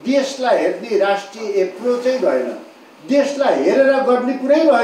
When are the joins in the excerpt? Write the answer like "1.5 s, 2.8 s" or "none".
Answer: none